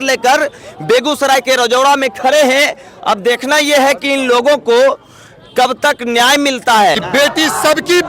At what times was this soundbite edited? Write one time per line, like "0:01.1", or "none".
0:07.0